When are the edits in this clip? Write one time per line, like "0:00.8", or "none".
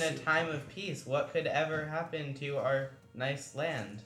0:03.0